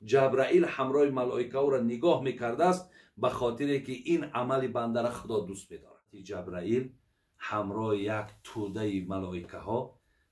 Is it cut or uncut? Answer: cut